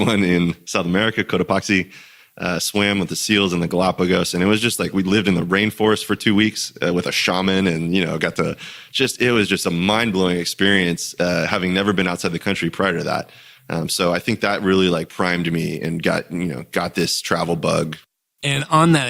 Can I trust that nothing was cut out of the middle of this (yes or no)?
yes